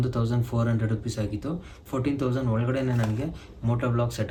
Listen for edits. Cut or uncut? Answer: uncut